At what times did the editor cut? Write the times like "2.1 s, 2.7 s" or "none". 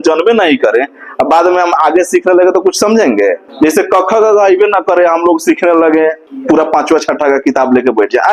3.4 s, 6.3 s